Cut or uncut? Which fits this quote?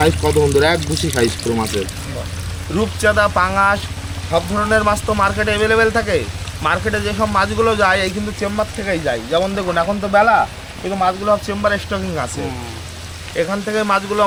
uncut